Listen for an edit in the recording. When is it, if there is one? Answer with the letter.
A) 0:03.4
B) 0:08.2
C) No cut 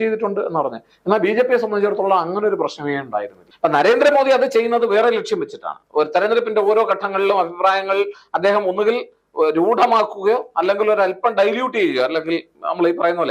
A